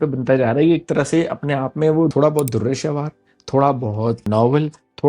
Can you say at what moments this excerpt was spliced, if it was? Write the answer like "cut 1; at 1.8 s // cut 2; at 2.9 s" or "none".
cut 1; at 2.1 s // cut 2; at 4.2 s